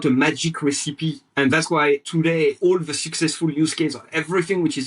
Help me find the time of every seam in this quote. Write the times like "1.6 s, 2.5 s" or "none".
1.2 s, 2.5 s